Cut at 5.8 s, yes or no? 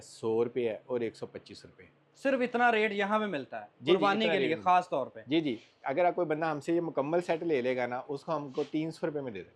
no